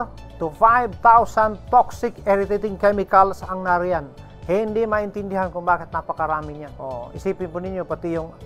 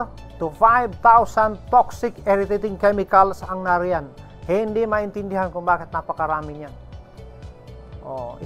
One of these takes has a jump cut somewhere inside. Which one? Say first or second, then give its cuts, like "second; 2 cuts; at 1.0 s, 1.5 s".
first; 1 cut; at 6.7 s